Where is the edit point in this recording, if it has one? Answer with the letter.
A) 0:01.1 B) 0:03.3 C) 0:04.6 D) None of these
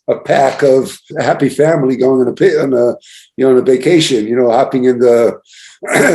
A